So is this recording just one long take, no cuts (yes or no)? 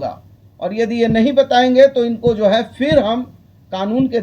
yes